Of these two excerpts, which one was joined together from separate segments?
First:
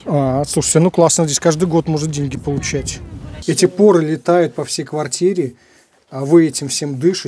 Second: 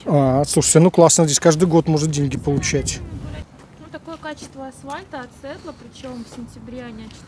first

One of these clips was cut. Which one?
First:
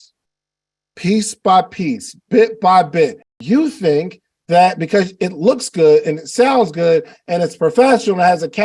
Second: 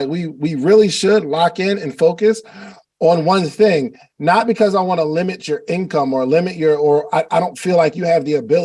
first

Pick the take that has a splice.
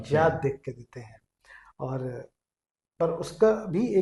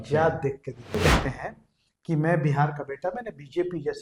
second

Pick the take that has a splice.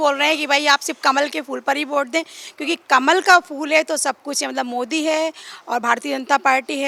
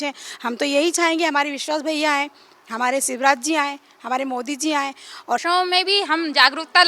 second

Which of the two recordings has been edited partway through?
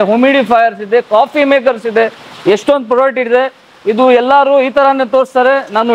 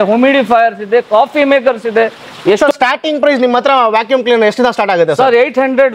second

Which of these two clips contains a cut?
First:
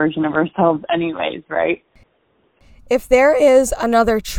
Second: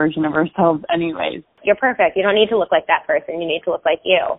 second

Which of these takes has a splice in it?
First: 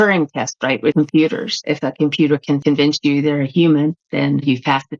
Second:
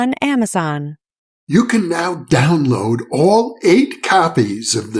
first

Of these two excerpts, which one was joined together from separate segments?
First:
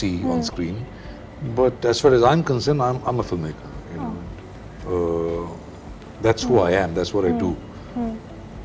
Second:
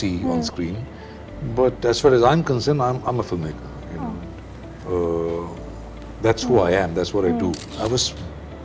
second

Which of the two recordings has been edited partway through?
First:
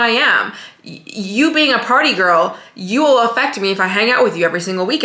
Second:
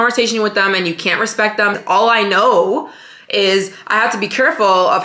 second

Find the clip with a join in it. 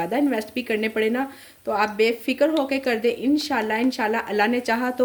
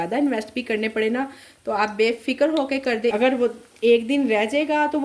second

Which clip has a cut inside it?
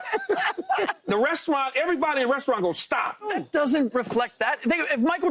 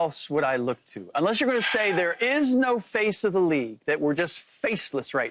first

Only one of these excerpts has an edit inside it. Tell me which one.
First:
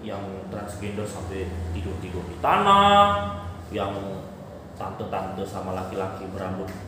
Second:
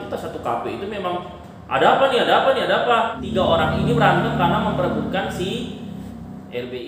second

